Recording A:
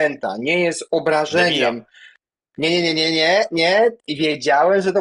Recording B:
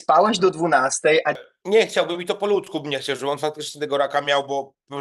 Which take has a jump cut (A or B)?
B